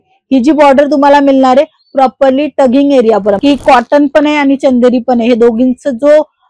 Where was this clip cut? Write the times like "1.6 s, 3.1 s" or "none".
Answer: 3.4 s